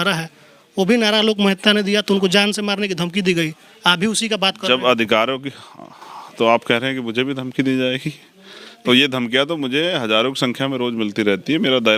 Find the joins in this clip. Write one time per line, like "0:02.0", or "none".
none